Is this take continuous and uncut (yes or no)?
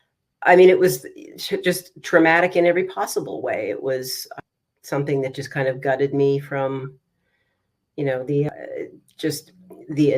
no